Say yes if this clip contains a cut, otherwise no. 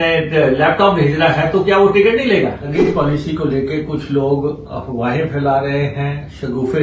yes